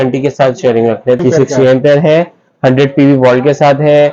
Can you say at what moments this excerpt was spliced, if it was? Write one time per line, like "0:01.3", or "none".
0:01.2